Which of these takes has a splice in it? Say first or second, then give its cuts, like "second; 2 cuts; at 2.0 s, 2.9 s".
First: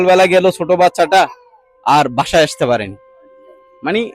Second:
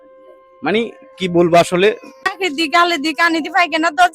second; 1 cut; at 2.4 s